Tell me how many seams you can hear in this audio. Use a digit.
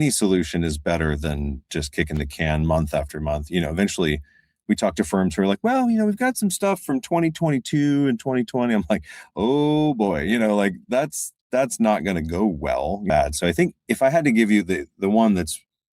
1